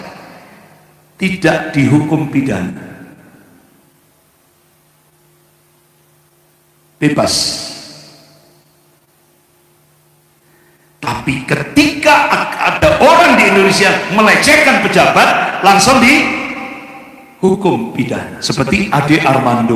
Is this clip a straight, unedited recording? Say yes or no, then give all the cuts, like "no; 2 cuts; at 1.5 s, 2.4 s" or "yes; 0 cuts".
no; 1 cut; at 18.4 s